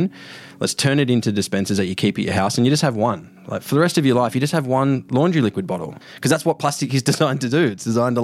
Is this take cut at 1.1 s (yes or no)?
no